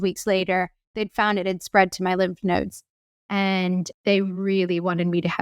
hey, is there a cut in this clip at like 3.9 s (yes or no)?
yes